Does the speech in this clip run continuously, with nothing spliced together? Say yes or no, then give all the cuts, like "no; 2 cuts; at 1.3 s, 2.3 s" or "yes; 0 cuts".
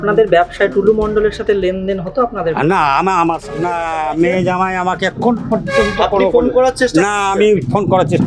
no; 1 cut; at 3.5 s